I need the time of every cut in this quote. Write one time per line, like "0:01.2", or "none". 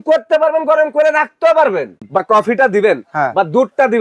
0:02.0